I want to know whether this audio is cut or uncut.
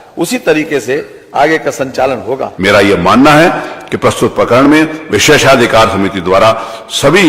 cut